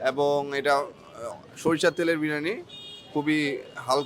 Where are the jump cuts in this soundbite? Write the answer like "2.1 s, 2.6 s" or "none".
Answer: none